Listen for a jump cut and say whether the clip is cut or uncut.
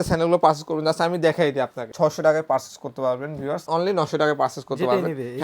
cut